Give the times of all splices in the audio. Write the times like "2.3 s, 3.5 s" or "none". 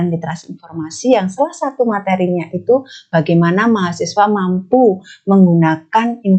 none